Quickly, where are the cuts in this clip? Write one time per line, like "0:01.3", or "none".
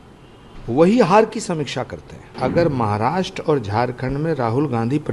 0:02.3

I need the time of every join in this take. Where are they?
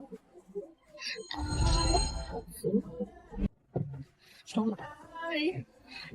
0:03.5

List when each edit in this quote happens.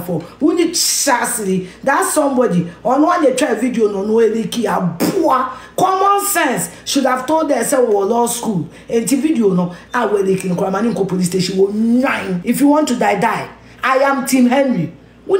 0:12.3

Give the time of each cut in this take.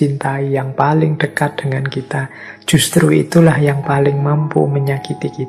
none

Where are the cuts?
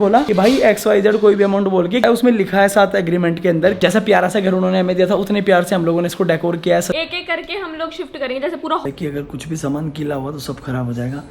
0:02.0
0:03.8
0:06.9
0:08.8

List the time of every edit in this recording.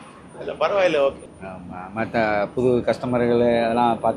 none

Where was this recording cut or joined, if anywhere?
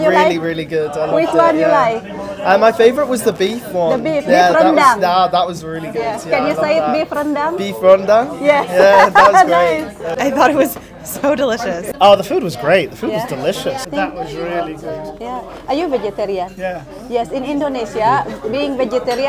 0:10.1
0:11.8
0:13.9

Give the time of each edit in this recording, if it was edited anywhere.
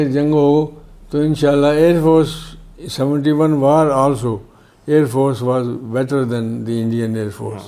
none

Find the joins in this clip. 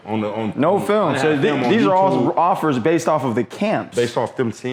none

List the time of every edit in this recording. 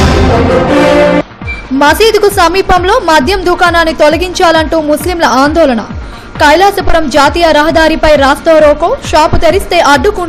0:01.3

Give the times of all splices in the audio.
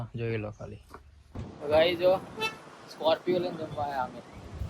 0:01.5

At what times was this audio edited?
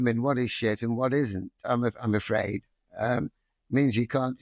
0:01.6

